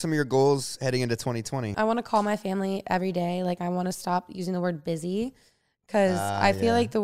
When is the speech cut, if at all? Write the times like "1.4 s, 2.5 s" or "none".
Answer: 1.7 s